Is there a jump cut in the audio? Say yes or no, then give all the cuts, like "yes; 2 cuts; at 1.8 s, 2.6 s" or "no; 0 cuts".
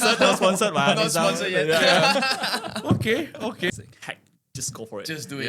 yes; 1 cut; at 3.7 s